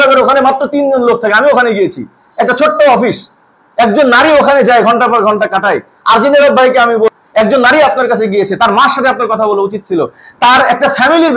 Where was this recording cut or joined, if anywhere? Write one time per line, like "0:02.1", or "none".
0:07.1